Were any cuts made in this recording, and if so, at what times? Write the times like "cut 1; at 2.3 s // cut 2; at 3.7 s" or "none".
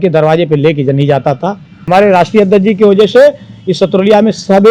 cut 1; at 1.7 s